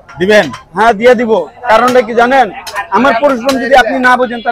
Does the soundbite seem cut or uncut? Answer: uncut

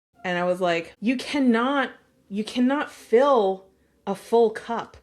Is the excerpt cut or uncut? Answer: cut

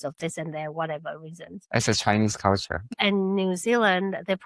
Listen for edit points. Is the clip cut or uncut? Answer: uncut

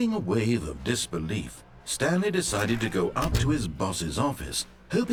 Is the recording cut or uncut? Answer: uncut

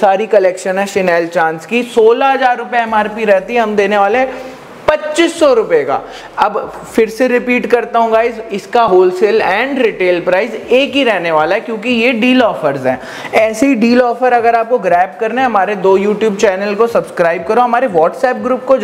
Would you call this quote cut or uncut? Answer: uncut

